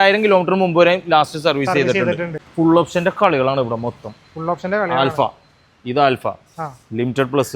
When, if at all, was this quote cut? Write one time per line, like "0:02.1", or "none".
0:02.4